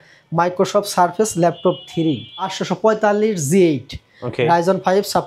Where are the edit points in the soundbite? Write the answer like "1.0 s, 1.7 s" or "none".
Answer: 2.6 s